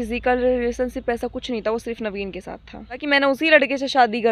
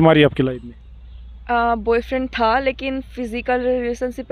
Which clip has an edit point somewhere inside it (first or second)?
first